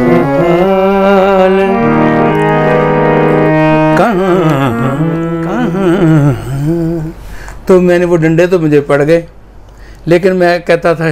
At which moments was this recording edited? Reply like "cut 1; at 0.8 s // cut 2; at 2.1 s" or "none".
cut 1; at 5.6 s